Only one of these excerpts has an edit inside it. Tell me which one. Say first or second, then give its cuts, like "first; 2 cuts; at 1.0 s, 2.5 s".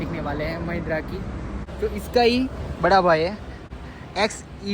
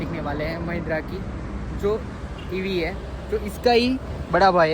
first; 2 cuts; at 1.6 s, 3.7 s